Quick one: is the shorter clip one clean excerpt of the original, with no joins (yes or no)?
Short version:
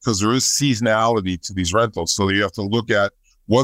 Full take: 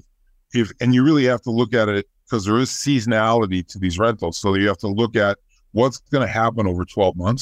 yes